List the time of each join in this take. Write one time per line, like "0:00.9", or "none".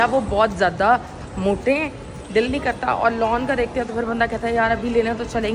none